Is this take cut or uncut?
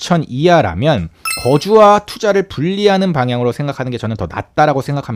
uncut